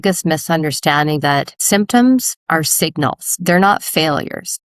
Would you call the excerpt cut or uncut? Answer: cut